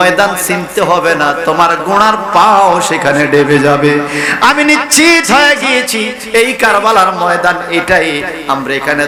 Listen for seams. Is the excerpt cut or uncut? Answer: uncut